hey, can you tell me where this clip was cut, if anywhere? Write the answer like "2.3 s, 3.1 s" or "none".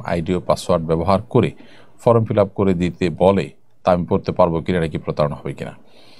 none